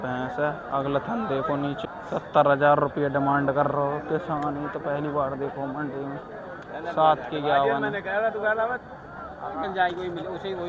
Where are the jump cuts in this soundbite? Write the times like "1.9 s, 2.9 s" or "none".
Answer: 1.8 s